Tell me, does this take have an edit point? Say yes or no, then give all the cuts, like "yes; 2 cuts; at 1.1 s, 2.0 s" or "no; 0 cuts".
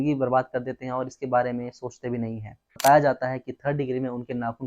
yes; 1 cut; at 2.6 s